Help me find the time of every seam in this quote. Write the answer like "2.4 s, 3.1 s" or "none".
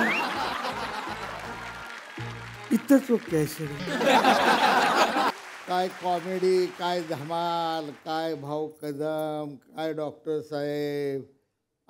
5.5 s